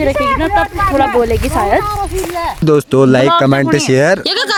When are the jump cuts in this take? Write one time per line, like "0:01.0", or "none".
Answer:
none